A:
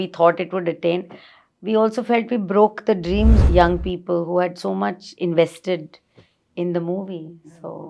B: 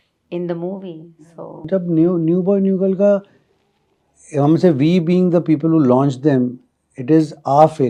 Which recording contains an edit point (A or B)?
A